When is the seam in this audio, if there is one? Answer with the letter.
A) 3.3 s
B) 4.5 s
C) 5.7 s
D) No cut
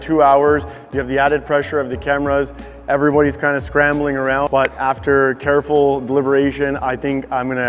B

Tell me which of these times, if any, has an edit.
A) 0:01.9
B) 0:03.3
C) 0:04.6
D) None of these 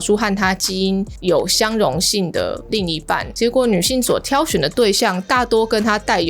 B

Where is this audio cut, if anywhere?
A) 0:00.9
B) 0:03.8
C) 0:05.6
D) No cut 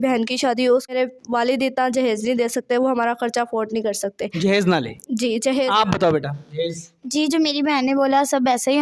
A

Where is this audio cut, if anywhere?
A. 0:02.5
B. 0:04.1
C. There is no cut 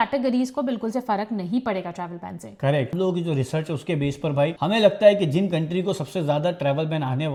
C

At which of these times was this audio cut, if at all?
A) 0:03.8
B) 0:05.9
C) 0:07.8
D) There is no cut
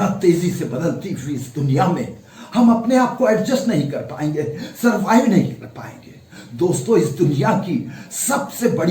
D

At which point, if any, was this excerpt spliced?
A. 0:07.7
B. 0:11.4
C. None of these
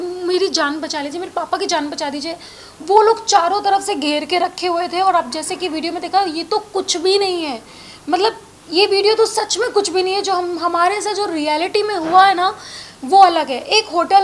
C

